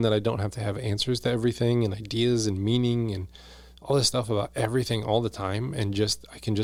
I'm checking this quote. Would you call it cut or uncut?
uncut